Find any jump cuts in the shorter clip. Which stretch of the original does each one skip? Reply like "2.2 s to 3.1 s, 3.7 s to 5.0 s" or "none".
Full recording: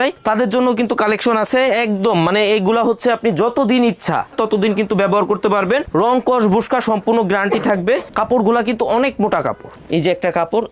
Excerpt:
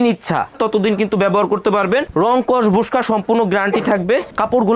none